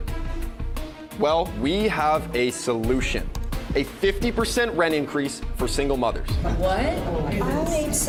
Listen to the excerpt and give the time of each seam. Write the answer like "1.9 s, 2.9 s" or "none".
none